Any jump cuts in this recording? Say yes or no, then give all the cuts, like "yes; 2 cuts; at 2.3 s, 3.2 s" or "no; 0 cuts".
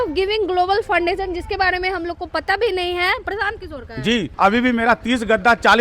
yes; 1 cut; at 4.3 s